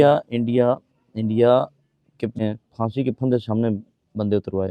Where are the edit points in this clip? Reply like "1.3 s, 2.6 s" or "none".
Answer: 2.4 s